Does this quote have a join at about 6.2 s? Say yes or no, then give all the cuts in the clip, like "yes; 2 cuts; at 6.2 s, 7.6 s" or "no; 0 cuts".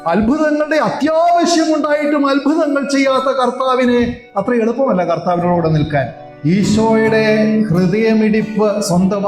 yes; 1 cut; at 6.2 s